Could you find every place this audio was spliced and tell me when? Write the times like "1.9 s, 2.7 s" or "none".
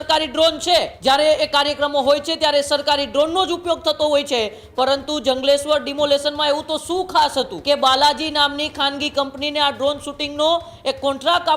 0.9 s, 7.5 s